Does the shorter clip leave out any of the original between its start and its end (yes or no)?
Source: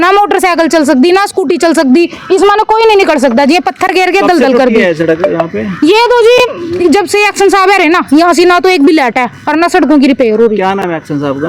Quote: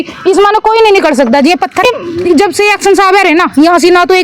yes